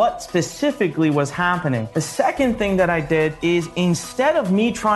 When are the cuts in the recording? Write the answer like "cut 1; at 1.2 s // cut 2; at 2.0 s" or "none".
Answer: cut 1; at 1.9 s // cut 2; at 3.4 s